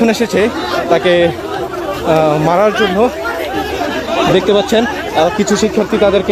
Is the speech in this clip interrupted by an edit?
no; 0 cuts

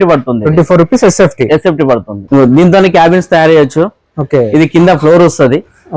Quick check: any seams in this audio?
yes; 1 cut; at 2.2 s

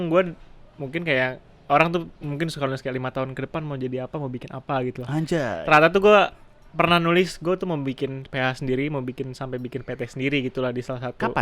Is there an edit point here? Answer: no; 0 cuts

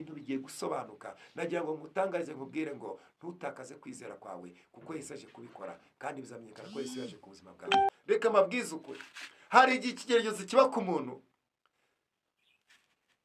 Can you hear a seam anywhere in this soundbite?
yes; 1 cut; at 7.9 s

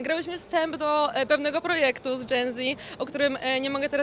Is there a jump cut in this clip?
no; 0 cuts

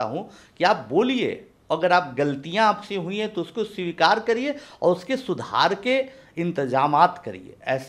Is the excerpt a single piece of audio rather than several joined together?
yes; 0 cuts

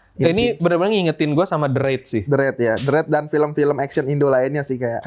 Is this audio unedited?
yes; 0 cuts

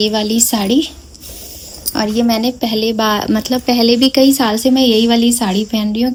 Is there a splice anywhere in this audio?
no; 0 cuts

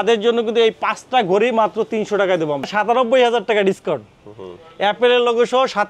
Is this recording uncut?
no; 1 cut; at 2.7 s

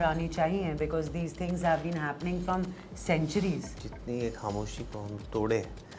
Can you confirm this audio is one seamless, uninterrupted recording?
no; 1 cut; at 3.7 s

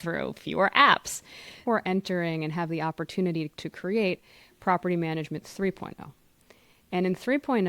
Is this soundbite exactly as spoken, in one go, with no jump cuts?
no; 1 cut; at 1.6 s

